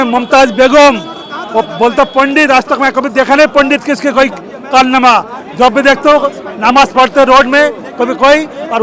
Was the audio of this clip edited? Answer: no; 0 cuts

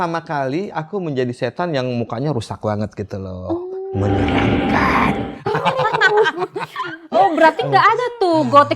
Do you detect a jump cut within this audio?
no; 0 cuts

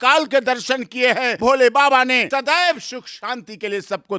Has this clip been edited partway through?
yes; 2 cuts; at 1.3 s, 2.3 s

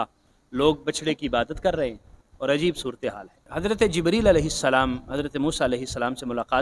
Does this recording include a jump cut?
yes; 1 cut; at 3.5 s

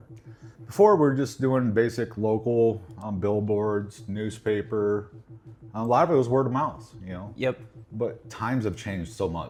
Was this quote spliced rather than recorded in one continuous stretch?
no; 0 cuts

